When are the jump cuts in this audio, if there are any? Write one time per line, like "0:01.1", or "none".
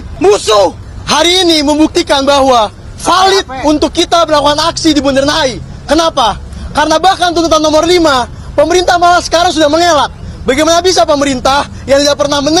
none

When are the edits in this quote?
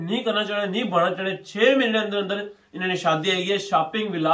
none

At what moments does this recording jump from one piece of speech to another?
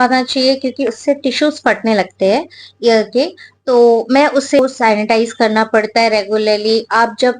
0:04.6

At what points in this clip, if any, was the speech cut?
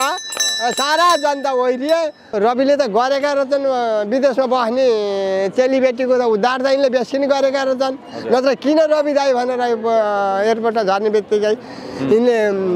0:02.3

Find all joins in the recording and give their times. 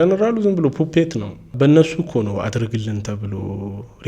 0:01.5

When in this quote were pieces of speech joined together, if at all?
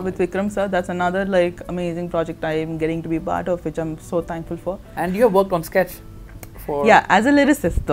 0:04.9

